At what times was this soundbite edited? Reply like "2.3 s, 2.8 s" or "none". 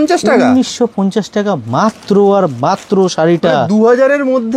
none